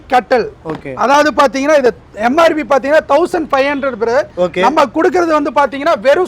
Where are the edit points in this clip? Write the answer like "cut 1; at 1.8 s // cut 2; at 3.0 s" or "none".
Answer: none